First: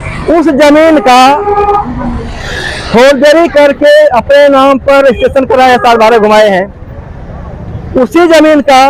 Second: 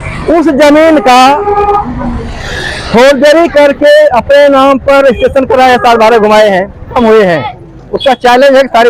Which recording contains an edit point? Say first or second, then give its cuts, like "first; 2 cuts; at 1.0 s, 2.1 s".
second; 1 cut; at 7.0 s